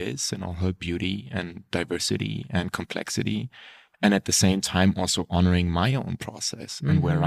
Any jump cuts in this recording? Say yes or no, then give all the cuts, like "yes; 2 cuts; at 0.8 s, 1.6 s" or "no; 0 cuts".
no; 0 cuts